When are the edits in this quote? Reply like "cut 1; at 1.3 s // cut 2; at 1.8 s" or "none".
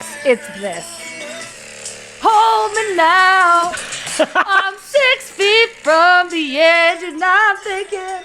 cut 1; at 1.5 s